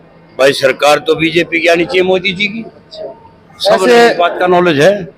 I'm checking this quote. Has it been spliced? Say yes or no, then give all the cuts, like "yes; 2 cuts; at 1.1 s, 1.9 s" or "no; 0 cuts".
no; 0 cuts